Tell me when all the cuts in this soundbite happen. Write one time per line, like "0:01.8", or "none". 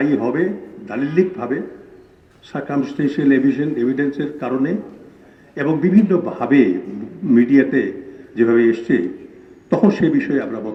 none